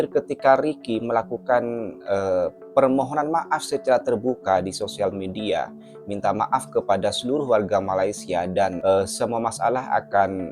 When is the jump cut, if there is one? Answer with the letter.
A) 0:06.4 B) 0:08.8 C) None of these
B